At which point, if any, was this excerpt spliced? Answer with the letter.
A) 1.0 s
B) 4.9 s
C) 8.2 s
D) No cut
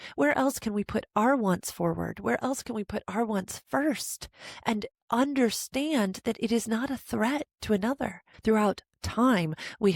C